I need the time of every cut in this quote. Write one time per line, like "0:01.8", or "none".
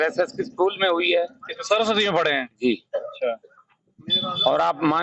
none